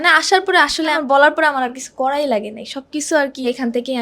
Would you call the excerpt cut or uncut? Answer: cut